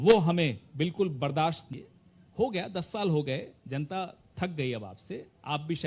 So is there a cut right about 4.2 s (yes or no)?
no